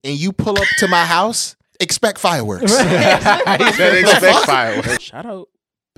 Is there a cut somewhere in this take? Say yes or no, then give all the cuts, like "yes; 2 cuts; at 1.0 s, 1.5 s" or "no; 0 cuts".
yes; 1 cut; at 4.9 s